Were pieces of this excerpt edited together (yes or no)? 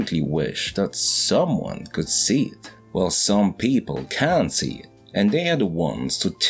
no